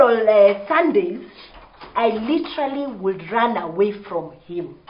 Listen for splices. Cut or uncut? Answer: uncut